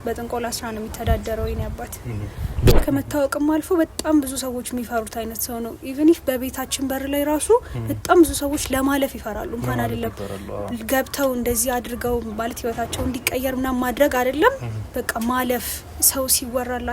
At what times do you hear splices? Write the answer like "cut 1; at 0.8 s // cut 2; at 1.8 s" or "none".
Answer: cut 1; at 2.7 s